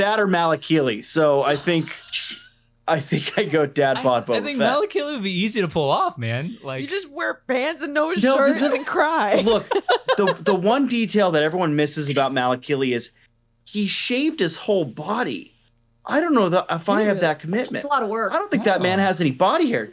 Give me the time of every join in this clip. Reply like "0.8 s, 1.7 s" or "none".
none

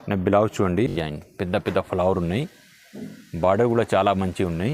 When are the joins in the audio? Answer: 0.9 s

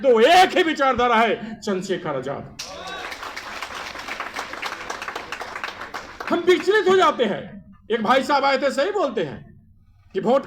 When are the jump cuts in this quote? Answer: none

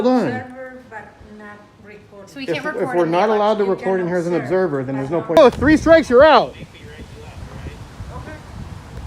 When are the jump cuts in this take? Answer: 5.3 s

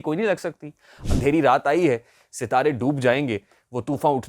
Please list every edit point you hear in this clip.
0.9 s

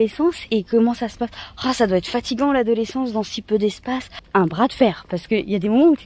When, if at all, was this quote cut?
4.1 s

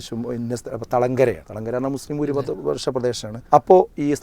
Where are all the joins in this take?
1.5 s, 3.3 s

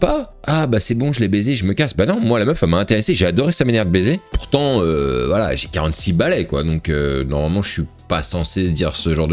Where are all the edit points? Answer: 4.3 s

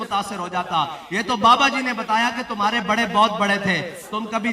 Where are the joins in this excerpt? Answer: 0.9 s

